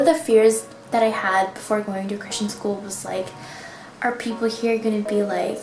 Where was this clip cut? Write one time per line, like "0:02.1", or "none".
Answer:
none